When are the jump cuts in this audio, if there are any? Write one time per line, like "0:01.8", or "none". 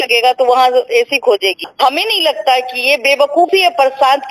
none